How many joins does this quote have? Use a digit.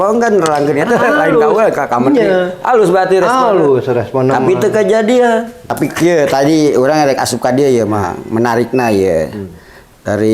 1